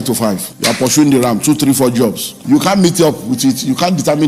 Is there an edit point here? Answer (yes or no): yes